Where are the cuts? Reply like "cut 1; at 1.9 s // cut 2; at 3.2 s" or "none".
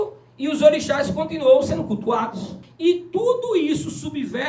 cut 1; at 2.6 s